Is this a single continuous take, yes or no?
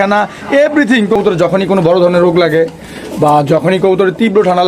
no